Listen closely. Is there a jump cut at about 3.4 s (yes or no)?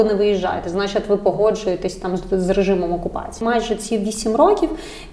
yes